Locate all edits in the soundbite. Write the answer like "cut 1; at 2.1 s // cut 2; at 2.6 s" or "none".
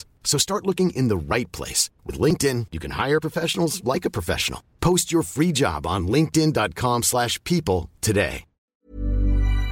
cut 1; at 8.8 s